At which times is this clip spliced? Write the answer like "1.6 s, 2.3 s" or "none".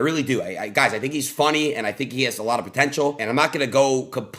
3.2 s